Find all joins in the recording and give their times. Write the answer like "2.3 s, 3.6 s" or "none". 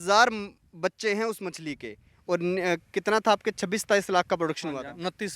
2.1 s